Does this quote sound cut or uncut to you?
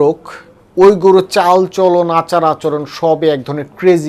uncut